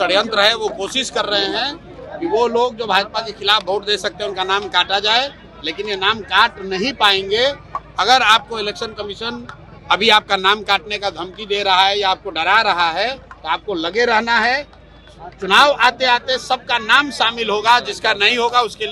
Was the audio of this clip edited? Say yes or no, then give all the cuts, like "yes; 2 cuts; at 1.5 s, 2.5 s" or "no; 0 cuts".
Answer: no; 0 cuts